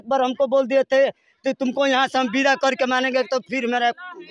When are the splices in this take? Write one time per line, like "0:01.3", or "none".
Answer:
none